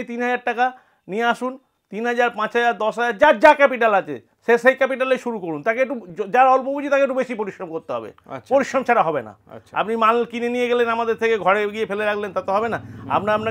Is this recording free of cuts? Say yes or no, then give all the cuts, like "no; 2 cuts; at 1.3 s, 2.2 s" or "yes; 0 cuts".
yes; 0 cuts